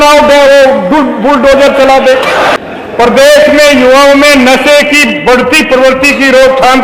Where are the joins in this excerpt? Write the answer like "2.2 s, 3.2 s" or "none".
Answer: 2.5 s